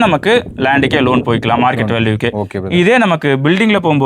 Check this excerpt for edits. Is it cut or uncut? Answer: uncut